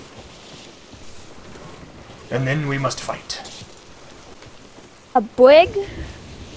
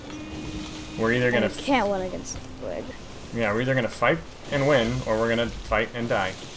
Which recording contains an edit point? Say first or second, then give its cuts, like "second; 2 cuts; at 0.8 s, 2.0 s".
first; 1 cut; at 1.0 s